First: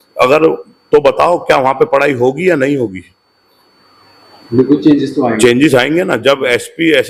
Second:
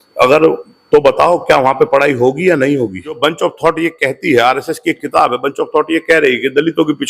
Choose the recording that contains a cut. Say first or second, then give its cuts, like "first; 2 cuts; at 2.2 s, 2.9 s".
second; 1 cut; at 3.2 s